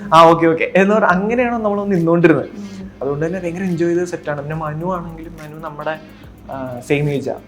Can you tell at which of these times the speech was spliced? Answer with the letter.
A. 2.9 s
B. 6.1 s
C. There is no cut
A